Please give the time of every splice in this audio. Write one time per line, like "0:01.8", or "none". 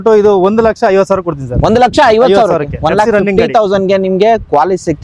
none